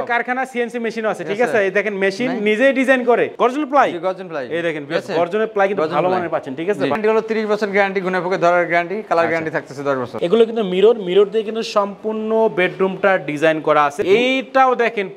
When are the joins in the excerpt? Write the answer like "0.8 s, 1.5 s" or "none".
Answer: 3.3 s, 7.0 s, 10.1 s, 14.0 s